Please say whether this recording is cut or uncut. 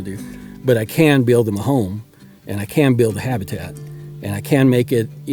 uncut